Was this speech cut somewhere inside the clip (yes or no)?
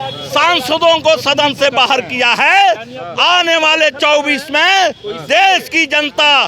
no